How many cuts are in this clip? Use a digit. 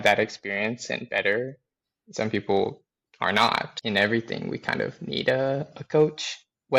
1